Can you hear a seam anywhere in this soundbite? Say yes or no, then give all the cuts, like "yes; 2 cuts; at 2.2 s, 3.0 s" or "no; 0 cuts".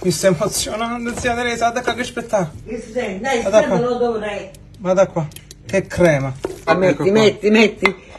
yes; 1 cut; at 6.7 s